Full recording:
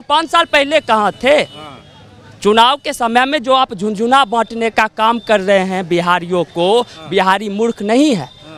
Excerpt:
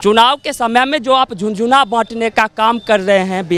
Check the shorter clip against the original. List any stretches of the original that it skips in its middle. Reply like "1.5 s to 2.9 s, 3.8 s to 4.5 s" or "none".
none